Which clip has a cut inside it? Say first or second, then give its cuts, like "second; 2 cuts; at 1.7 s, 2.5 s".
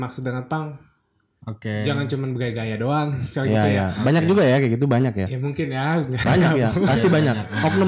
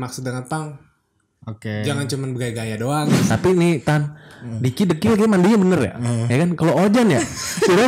second; 1 cut; at 3.2 s